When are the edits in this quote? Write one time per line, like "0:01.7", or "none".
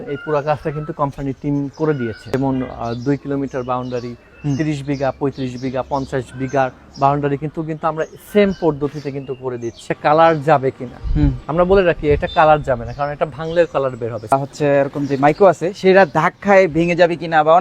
0:02.3
0:09.9
0:14.3